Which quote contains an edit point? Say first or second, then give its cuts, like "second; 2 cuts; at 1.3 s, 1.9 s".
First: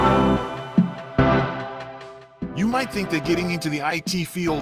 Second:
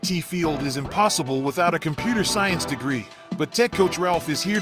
second; 1 cut; at 2.6 s